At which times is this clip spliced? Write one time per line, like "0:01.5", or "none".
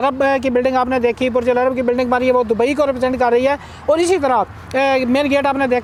none